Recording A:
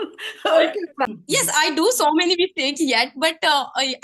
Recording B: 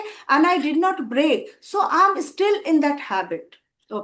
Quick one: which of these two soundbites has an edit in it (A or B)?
A